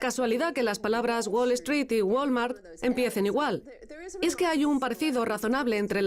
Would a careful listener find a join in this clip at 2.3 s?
yes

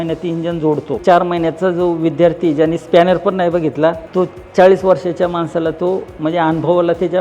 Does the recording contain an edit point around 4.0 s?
yes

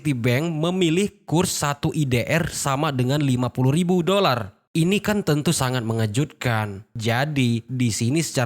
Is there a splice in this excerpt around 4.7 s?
no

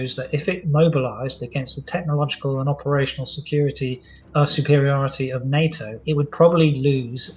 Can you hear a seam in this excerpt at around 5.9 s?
yes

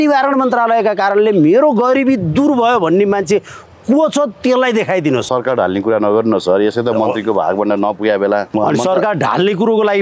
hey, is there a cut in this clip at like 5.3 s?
yes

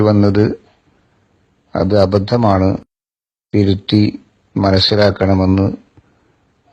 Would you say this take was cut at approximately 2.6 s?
yes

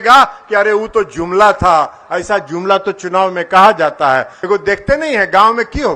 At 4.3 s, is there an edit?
yes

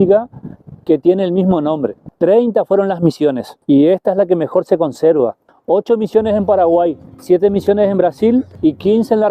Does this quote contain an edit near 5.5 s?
yes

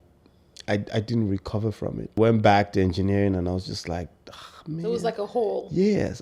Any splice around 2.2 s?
yes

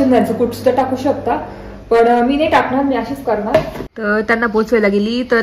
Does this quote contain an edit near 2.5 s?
no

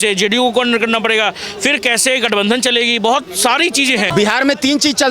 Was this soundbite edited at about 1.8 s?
no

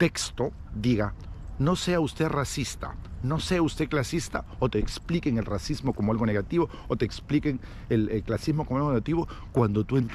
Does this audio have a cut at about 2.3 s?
no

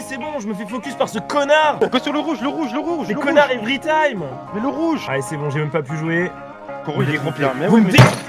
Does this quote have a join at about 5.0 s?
yes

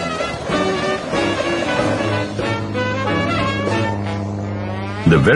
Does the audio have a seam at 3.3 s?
yes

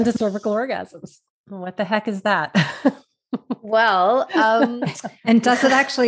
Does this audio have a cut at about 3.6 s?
no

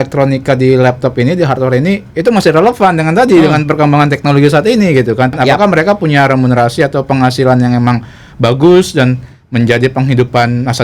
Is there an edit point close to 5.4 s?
yes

